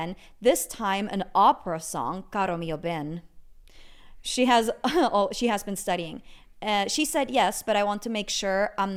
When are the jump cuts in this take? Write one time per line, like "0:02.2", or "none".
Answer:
none